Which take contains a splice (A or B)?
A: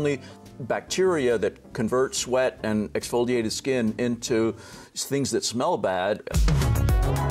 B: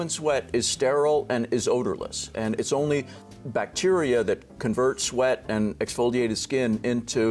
A